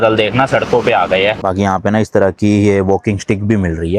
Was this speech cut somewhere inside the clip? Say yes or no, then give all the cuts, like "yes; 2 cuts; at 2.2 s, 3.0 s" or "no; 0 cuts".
yes; 1 cut; at 1.4 s